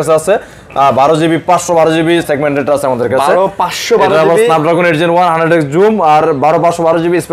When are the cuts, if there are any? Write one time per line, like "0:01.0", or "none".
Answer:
none